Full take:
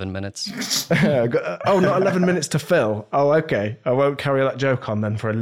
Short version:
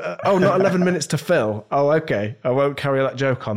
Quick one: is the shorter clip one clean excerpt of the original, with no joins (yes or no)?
yes